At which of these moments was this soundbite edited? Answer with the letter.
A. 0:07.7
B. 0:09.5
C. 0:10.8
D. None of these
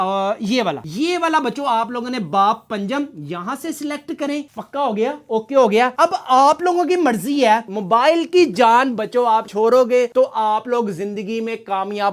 A